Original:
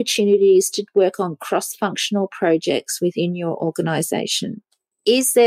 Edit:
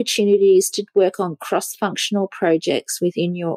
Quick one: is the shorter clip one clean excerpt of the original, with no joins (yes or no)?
yes